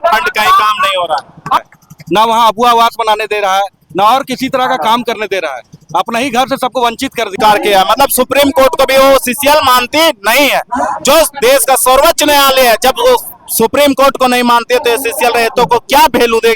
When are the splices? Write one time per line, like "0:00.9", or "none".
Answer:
0:01.6
0:07.3